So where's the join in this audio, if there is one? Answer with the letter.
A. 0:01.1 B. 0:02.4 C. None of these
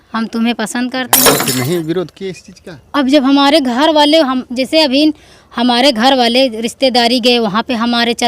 A